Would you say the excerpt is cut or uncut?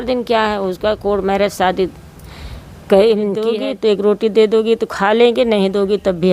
cut